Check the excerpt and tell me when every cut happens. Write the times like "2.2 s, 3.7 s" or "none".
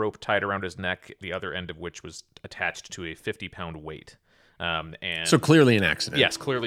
none